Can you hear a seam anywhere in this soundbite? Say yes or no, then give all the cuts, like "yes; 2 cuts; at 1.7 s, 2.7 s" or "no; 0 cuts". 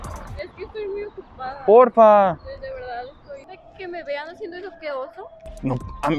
yes; 1 cut; at 3.5 s